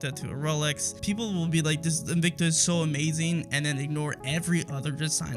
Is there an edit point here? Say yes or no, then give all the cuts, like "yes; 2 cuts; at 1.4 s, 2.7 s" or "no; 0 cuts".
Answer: yes; 1 cut; at 1.0 s